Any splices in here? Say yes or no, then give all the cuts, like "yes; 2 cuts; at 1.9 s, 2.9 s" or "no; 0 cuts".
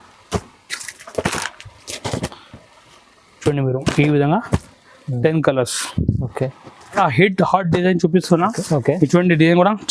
yes; 1 cut; at 7.0 s